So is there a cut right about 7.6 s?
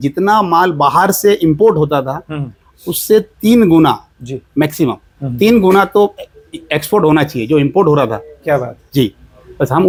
no; 0 cuts

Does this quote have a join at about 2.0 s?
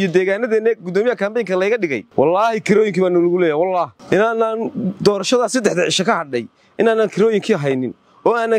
yes; 2 cuts; at 2.0 s, 4.0 s

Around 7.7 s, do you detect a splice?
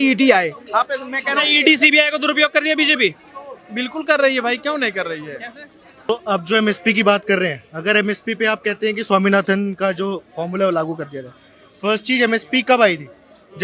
no; 1 cut; at 6.1 s

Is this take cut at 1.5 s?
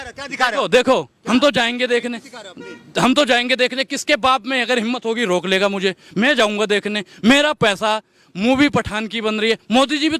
no; 0 cuts

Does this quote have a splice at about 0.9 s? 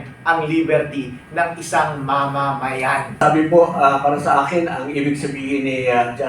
no; 1 cut; at 3.2 s

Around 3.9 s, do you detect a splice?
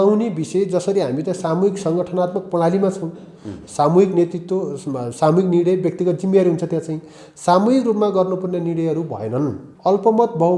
no; 1 cut; at 9.6 s

